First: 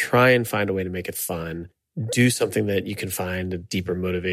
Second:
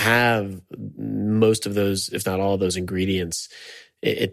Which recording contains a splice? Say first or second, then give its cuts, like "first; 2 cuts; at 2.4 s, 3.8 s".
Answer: first; 1 cut; at 1.8 s